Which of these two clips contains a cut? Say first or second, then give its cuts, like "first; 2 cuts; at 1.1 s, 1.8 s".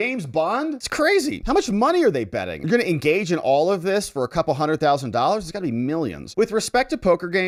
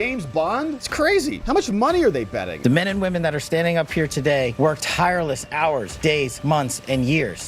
second; 1 cut; at 2.6 s